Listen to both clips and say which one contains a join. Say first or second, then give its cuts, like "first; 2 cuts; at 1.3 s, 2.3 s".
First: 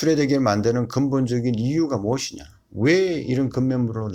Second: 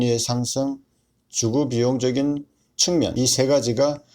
second; 1 cut; at 3.1 s